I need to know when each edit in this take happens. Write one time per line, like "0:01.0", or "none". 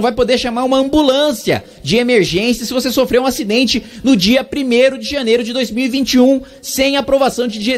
none